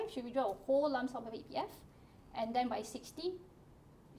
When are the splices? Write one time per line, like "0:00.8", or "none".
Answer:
none